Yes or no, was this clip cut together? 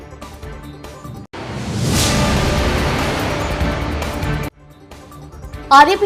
no